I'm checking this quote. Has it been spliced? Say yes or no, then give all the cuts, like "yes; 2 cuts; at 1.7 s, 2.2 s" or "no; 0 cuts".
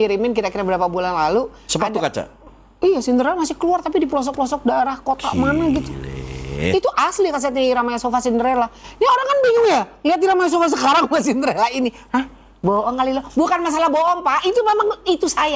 no; 0 cuts